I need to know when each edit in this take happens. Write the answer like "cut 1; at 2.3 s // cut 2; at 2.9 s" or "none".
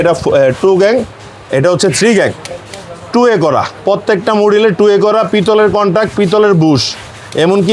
none